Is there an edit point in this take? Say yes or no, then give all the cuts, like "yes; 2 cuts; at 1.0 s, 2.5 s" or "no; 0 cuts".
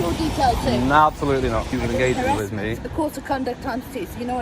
yes; 1 cut; at 1.7 s